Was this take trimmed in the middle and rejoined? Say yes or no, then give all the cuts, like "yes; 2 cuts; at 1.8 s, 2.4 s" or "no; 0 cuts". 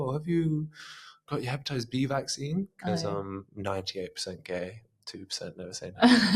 no; 0 cuts